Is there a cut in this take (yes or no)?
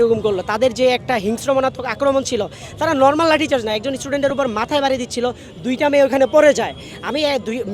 no